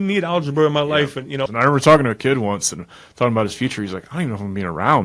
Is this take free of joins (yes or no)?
no